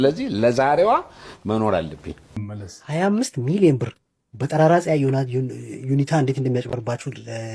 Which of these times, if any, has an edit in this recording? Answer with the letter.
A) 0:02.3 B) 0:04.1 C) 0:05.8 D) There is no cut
A